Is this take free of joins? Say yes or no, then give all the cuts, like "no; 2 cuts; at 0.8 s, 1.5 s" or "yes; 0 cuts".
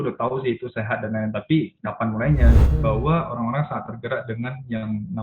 no; 1 cut; at 2.6 s